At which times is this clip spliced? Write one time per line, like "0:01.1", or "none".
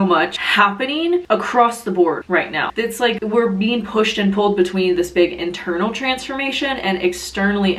0:02.6

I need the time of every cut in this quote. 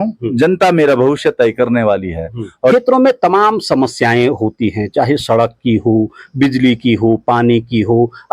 0:02.7

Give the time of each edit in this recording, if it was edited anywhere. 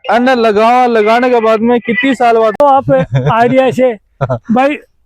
0:02.6

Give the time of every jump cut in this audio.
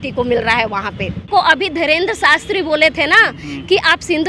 0:01.2

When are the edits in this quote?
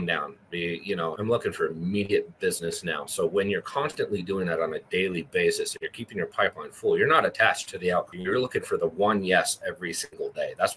0:01.2
0:08.1

